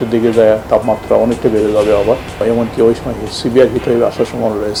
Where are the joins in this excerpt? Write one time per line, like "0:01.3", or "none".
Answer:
none